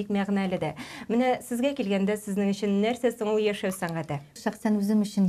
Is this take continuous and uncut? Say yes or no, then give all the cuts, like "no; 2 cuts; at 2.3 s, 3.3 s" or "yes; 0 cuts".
no; 1 cut; at 4.4 s